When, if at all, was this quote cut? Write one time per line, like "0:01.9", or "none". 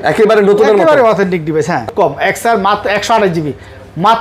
0:01.9

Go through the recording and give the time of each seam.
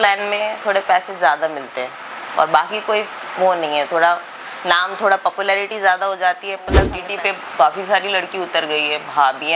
0:07.0

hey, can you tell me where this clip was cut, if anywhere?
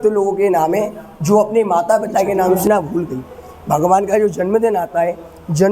0:02.6

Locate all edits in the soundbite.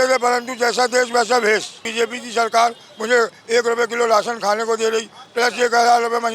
0:01.8

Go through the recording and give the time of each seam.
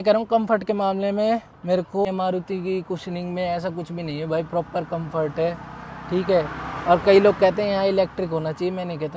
none

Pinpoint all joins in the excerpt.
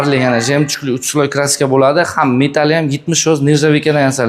none

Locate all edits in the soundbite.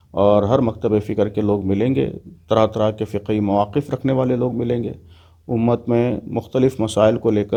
none

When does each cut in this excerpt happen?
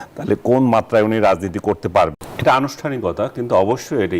0:02.2

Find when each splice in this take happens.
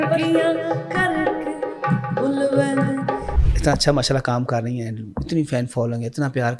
0:03.4

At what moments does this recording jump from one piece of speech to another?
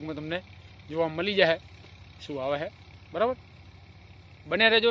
none

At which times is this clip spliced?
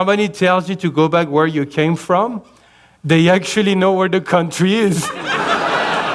none

